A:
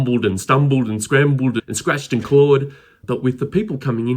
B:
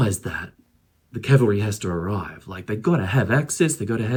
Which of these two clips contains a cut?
A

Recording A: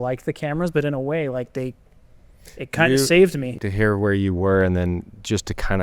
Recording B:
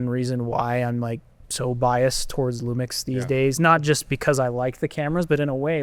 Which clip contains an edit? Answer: A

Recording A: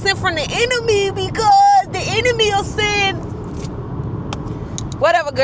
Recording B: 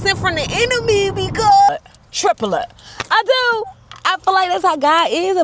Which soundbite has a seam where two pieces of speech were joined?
B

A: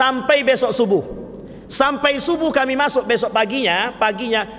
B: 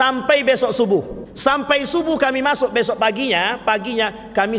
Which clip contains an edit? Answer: B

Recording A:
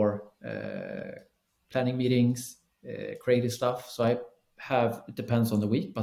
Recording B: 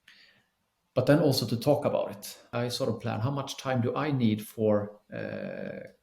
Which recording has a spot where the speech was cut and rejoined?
B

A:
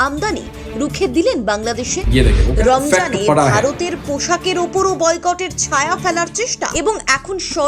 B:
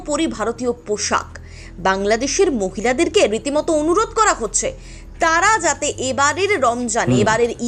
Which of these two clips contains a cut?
A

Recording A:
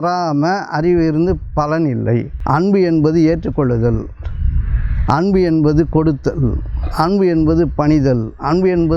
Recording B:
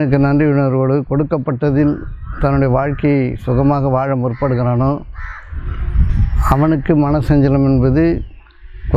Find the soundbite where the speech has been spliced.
A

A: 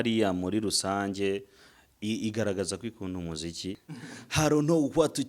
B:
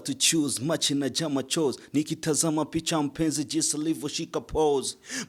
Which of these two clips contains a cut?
A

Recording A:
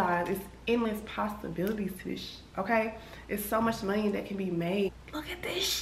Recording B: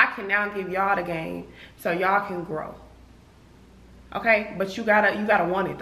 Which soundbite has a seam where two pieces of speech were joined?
A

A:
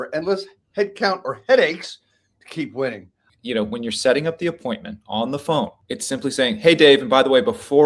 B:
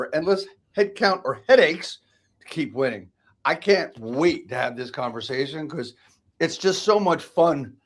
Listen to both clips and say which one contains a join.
A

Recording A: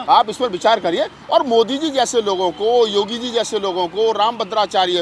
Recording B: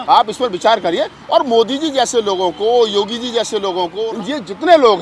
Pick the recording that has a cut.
B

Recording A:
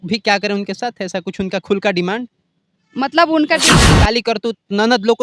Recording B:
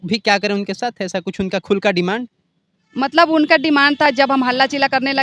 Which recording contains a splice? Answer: A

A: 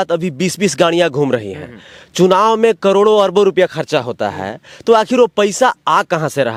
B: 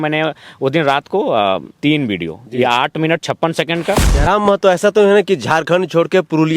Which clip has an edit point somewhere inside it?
B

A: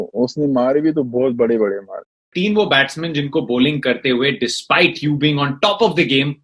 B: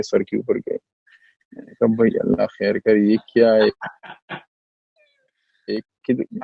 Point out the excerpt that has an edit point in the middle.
A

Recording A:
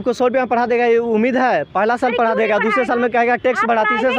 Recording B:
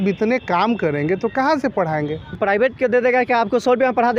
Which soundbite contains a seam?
B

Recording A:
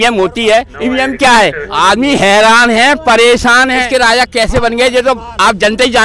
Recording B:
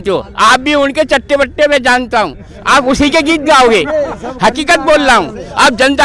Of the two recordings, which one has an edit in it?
A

